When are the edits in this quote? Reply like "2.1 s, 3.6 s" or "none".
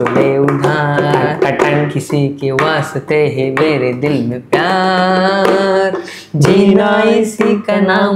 none